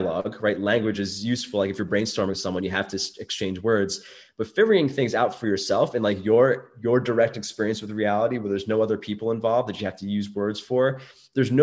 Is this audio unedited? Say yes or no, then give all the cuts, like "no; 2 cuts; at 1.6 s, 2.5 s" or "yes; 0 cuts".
yes; 0 cuts